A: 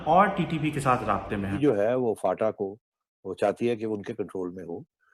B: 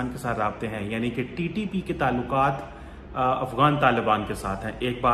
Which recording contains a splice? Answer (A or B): A